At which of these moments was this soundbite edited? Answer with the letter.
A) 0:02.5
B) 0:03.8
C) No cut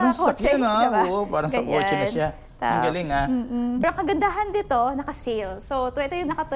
B